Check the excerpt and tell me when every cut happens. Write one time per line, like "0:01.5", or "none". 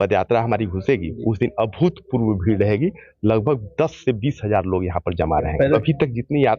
0:05.7